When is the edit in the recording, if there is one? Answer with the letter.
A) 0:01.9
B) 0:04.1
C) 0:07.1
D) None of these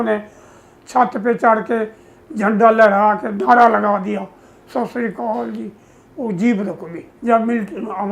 C